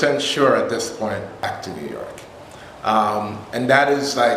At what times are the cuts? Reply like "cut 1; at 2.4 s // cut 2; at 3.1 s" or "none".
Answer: cut 1; at 1.5 s